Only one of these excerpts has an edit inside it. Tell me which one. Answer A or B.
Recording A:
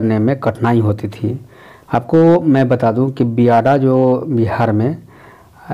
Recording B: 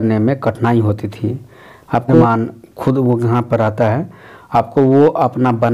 B